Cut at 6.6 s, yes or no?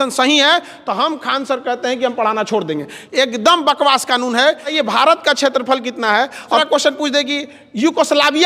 yes